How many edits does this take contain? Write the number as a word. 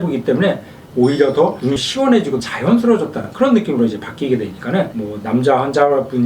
zero